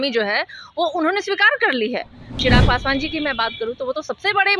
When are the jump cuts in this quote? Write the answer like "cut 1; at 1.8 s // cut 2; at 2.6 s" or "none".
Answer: cut 1; at 2.4 s